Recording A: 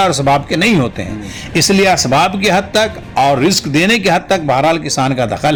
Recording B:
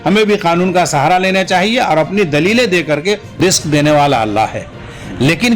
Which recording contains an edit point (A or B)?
B